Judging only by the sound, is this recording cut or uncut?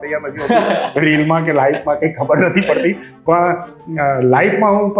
uncut